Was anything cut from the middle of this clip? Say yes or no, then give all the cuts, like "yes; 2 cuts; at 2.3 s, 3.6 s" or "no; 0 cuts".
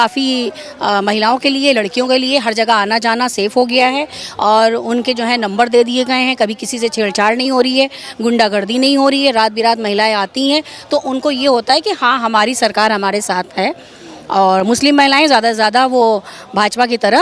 no; 0 cuts